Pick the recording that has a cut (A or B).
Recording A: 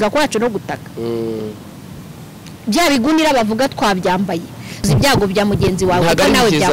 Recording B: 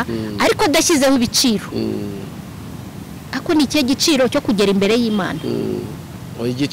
A